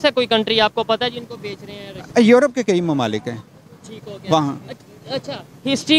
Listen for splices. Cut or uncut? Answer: uncut